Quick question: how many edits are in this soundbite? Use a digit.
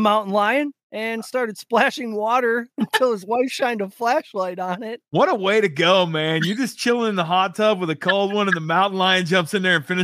1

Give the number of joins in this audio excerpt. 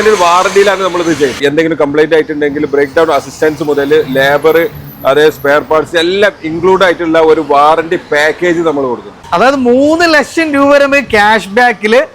2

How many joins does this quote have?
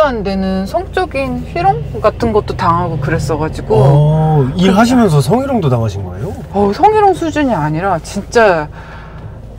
0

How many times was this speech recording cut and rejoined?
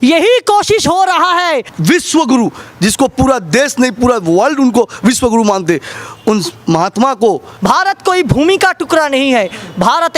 2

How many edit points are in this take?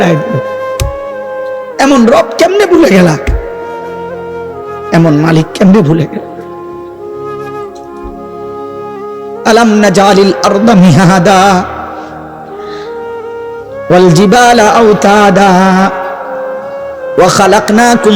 4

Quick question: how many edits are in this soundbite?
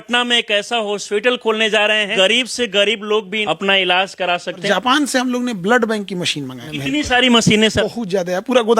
5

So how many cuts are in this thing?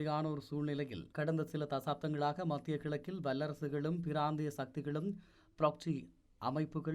1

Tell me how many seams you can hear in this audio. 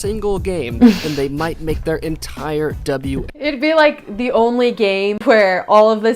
2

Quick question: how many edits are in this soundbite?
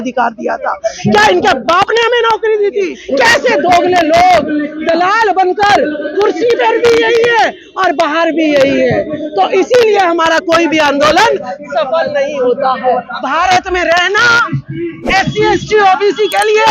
2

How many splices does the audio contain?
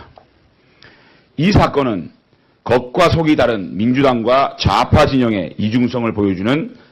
0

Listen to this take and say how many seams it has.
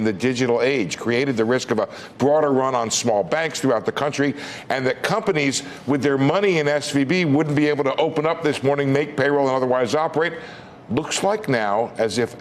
0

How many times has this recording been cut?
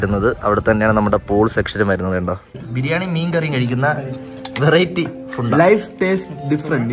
1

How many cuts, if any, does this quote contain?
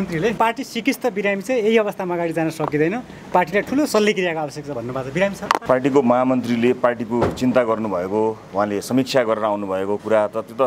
0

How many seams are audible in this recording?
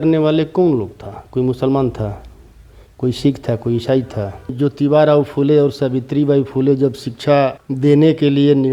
2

